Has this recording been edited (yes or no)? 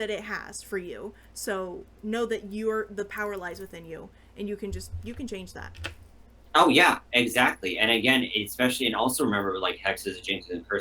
no